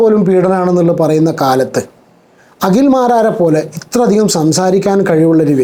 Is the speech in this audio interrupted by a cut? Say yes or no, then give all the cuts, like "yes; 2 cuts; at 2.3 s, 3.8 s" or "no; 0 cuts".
no; 0 cuts